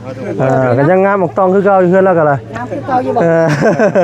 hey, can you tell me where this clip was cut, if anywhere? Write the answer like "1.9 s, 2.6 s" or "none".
none

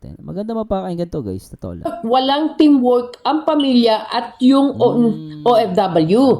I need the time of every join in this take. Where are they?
1.9 s

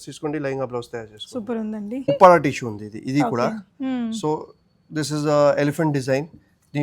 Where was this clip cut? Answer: 2.0 s

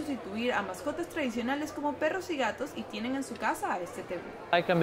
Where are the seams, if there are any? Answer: none

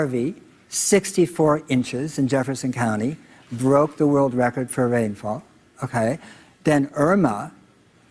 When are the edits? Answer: 6.6 s

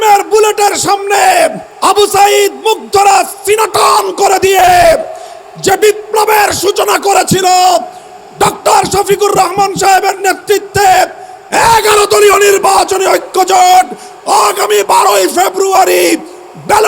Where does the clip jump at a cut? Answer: 1.7 s

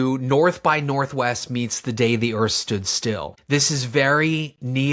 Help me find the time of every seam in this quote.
none

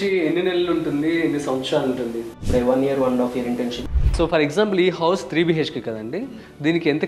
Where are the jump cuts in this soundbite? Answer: 2.5 s, 3.8 s

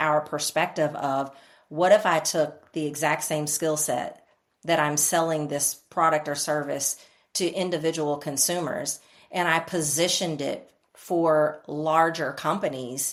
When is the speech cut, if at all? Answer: none

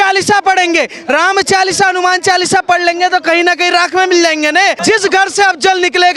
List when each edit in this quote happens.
4.8 s

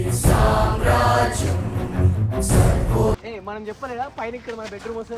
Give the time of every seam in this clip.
3.3 s

